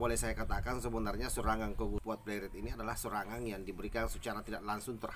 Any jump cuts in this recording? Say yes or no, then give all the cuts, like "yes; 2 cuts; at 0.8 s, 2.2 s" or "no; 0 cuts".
yes; 1 cut; at 2.0 s